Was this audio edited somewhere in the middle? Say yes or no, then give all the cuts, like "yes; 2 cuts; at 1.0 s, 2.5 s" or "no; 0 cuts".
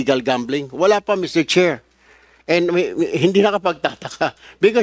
no; 0 cuts